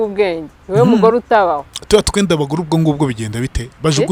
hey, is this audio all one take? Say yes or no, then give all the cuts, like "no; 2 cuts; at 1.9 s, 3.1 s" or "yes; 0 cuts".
yes; 0 cuts